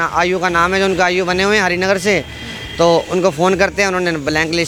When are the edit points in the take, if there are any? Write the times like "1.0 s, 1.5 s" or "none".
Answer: none

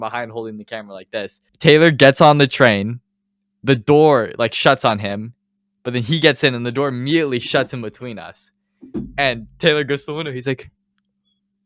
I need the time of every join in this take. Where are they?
1.4 s

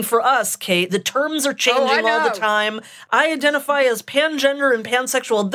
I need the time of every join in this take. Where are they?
0.9 s, 2.9 s

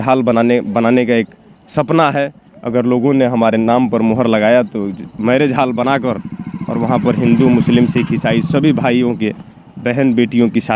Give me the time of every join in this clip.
none

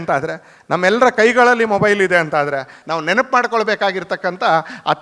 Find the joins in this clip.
2.7 s

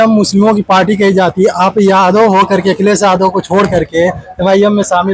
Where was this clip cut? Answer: none

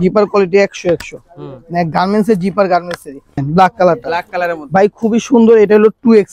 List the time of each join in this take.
3.4 s

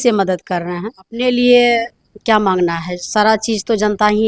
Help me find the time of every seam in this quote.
1.1 s

